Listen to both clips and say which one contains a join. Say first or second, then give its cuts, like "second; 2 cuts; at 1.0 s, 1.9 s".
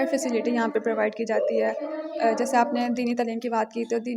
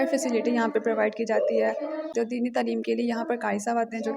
second; 1 cut; at 2.1 s